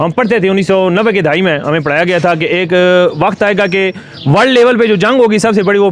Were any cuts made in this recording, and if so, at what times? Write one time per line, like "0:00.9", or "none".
none